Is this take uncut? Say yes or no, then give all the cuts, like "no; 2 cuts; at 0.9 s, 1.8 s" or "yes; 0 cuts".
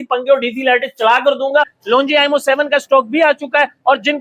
no; 1 cut; at 1.8 s